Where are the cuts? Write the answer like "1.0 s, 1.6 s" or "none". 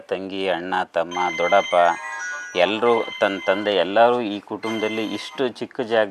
none